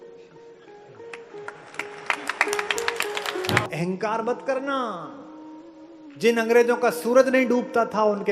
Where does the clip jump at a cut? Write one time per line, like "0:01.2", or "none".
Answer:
0:03.6

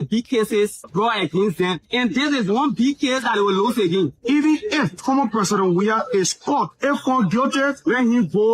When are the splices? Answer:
0:04.2
0:06.7

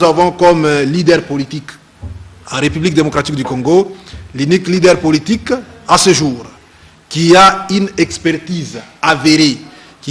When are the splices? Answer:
0:01.5

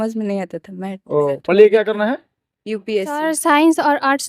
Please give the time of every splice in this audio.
0:03.2

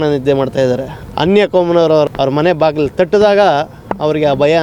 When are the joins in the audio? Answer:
0:00.9
0:02.1

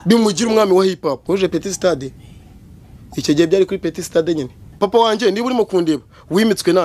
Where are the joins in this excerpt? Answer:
0:01.2
0:04.6

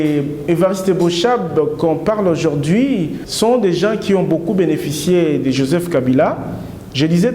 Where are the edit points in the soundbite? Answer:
0:03.2

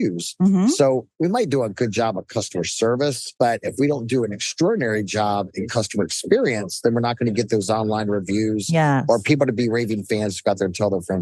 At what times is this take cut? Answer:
0:01.1
0:03.2

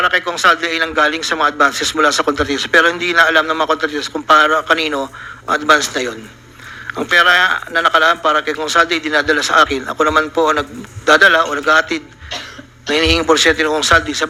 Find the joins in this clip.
none

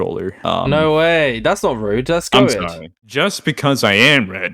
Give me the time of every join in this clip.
0:03.0

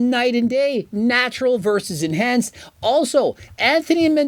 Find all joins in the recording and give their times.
none

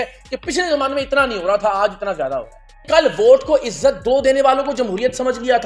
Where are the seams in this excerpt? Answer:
0:02.8

